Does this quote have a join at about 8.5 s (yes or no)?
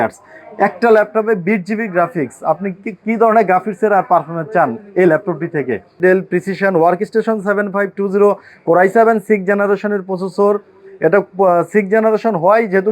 no